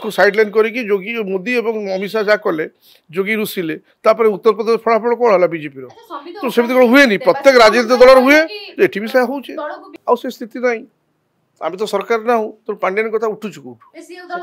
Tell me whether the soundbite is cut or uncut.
cut